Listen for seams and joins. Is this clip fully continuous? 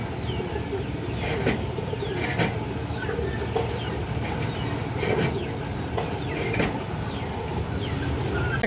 yes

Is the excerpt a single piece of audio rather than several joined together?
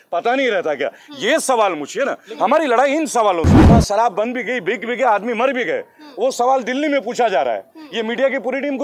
no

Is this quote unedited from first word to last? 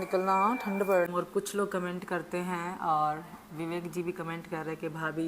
no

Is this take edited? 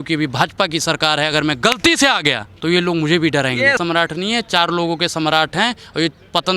yes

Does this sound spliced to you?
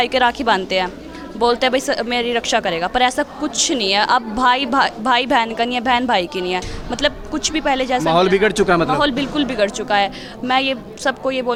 no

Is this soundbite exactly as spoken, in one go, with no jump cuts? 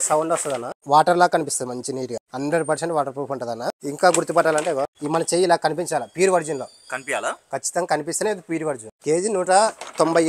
no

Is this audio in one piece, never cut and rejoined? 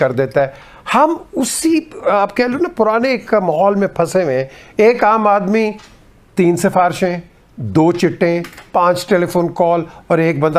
yes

